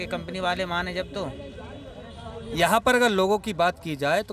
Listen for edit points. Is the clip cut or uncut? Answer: uncut